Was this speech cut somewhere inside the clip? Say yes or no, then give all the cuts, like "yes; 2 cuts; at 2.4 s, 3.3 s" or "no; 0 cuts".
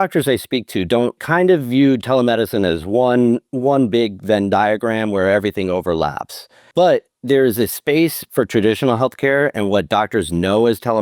yes; 2 cuts; at 1.2 s, 6.6 s